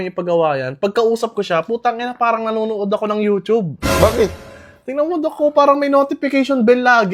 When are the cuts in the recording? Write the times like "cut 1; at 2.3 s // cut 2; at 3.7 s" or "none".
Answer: none